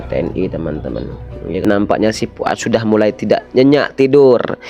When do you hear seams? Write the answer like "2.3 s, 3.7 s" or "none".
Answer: 1.6 s